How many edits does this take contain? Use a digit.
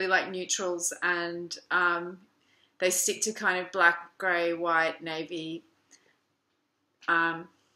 1